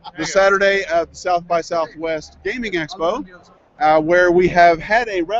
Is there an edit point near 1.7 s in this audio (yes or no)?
yes